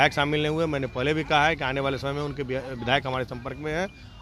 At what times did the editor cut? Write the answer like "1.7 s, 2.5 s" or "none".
none